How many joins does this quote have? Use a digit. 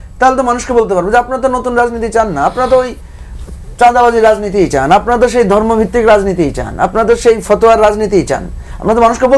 0